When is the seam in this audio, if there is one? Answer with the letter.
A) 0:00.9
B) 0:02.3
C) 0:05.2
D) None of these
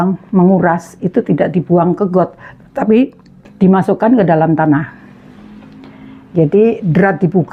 D